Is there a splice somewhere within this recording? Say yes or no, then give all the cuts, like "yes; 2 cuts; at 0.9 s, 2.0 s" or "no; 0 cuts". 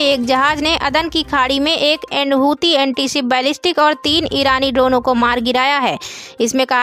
no; 0 cuts